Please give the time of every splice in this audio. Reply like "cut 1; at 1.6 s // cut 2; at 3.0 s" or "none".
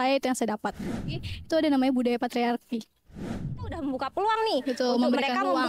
cut 1; at 1.2 s // cut 2; at 3.4 s